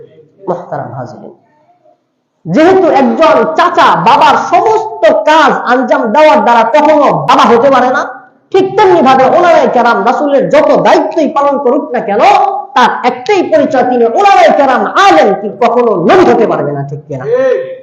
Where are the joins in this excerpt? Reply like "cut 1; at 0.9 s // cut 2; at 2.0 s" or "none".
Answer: cut 1; at 7.3 s